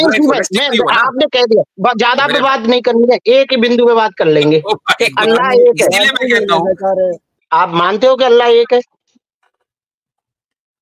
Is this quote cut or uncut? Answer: cut